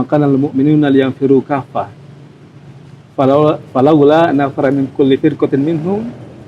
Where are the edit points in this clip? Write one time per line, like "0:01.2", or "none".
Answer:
none